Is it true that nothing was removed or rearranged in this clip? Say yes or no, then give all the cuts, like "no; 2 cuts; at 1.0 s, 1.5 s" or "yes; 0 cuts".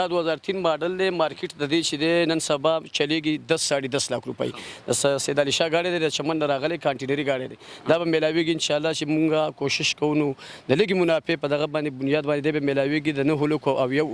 yes; 0 cuts